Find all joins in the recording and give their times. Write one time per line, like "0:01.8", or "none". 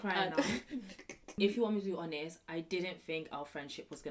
0:01.4